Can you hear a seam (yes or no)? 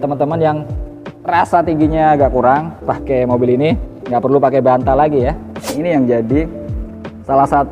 yes